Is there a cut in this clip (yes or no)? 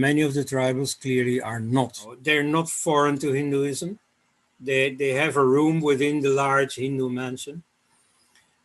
yes